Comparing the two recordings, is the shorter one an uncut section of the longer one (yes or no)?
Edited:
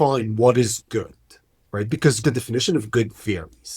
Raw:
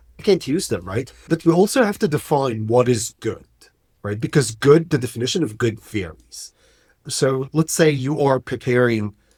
no